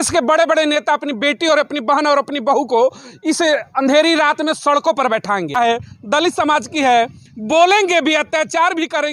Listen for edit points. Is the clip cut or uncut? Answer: cut